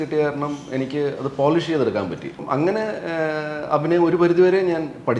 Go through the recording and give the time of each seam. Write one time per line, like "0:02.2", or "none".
0:02.4